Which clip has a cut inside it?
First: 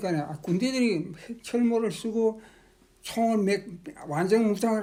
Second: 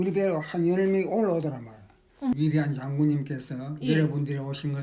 second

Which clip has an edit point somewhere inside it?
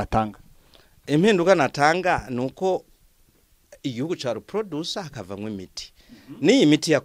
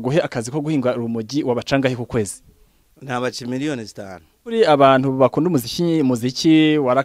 second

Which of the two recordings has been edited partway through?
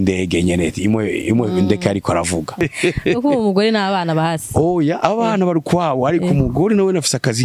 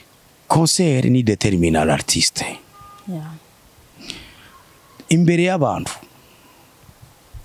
first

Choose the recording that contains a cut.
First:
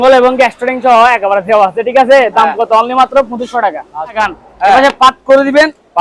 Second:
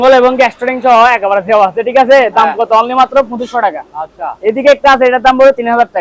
first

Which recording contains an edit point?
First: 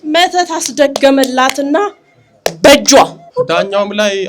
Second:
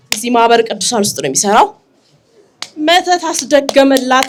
first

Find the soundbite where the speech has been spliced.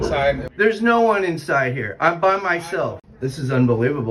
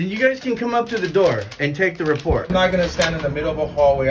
first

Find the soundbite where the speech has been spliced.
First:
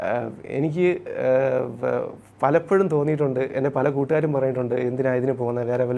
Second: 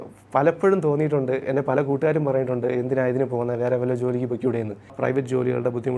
second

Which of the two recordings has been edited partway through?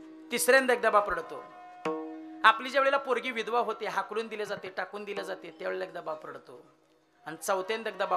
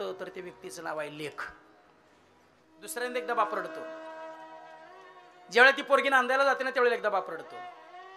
second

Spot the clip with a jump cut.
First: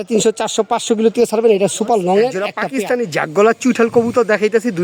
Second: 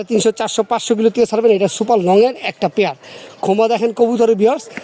first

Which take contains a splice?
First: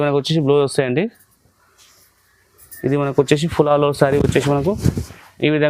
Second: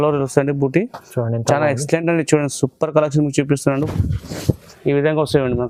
second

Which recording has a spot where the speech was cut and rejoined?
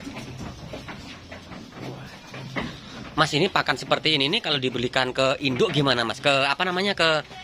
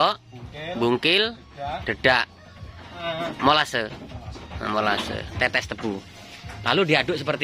second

